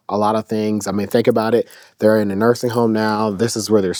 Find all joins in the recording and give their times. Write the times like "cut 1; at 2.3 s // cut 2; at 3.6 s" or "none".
none

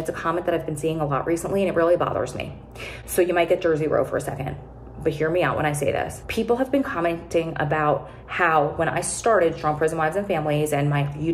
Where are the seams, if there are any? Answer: none

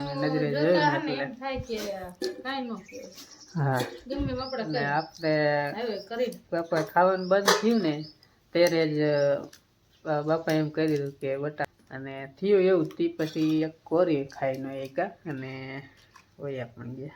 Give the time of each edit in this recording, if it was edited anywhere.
cut 1; at 11.7 s

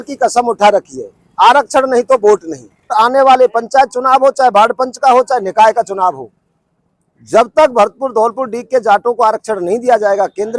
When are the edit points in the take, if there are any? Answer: cut 1; at 2.9 s

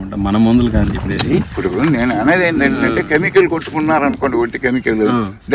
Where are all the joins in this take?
none

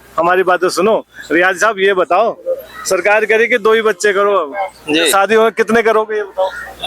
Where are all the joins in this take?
cut 1; at 5.1 s

